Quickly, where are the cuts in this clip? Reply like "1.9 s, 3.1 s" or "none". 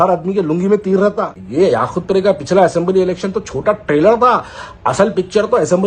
1.4 s